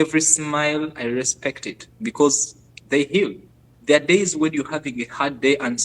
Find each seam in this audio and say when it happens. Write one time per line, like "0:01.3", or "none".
0:03.7